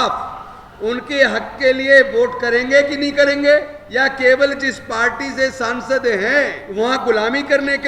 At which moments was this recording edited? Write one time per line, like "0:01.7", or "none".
0:03.8
0:06.6